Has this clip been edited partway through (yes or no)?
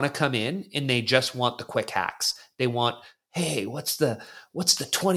no